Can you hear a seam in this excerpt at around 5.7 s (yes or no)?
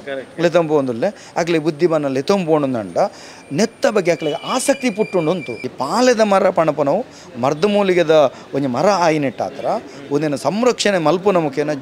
yes